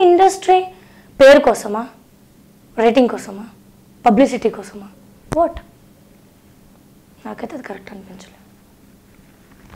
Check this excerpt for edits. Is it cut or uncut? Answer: uncut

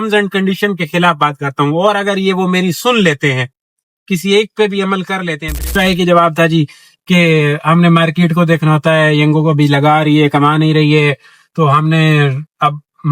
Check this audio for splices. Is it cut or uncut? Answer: cut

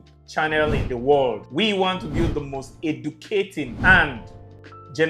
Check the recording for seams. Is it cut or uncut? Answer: cut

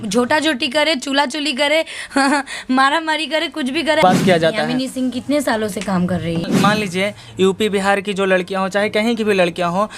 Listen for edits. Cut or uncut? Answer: cut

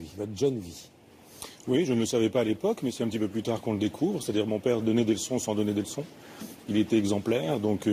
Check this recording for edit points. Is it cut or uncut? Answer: cut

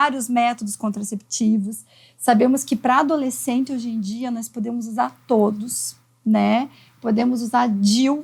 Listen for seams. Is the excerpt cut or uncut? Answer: uncut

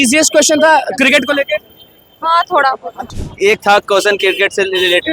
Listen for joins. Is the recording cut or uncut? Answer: cut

